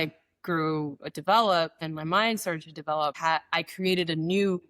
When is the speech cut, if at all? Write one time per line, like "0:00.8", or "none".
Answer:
0:01.8
0:03.2